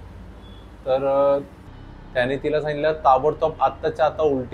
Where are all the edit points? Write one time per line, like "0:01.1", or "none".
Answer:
0:01.6